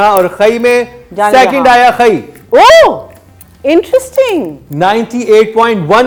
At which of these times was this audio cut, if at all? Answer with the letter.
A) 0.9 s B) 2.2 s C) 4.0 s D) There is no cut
D